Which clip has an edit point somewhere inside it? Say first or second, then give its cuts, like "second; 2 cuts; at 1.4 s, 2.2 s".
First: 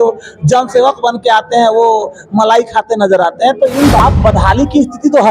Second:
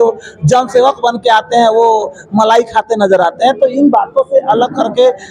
first; 1 cut; at 4.0 s